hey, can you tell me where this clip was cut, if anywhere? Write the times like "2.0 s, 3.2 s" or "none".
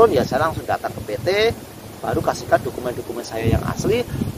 none